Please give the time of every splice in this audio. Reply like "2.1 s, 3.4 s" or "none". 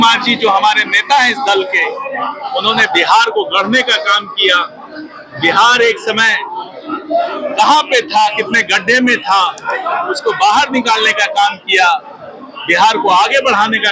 none